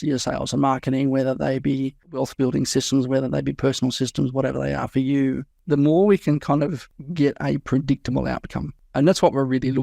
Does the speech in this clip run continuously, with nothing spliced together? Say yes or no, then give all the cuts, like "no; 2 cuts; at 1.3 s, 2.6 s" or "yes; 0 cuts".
yes; 0 cuts